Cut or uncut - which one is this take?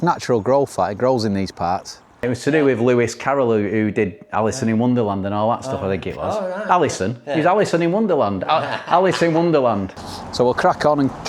cut